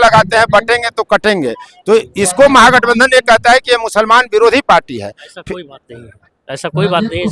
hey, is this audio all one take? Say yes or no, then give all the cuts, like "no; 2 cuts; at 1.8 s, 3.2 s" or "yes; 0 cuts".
yes; 0 cuts